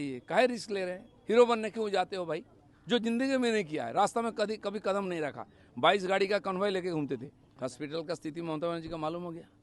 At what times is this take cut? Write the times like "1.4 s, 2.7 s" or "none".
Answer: 7.4 s